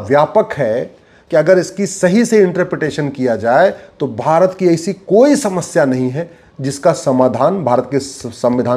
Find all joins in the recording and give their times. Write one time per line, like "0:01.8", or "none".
none